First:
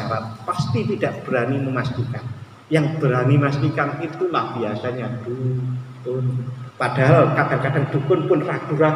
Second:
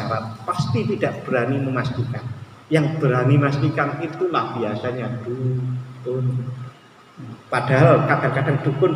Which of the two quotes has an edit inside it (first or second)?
first